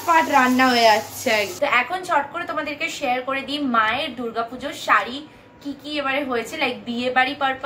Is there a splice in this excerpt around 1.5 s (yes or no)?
yes